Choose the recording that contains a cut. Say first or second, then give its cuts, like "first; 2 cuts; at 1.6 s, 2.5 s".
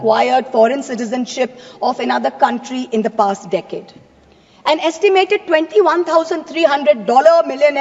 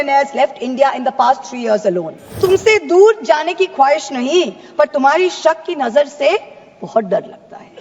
second; 1 cut; at 2.3 s